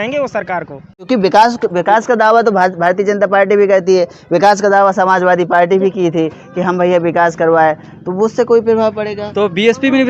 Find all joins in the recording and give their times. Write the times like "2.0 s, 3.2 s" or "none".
1.1 s